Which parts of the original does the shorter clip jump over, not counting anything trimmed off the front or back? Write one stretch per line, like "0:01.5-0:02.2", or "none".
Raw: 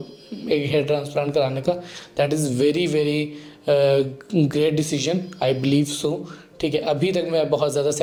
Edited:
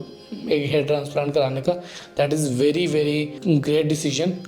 0:03.3-0:04.2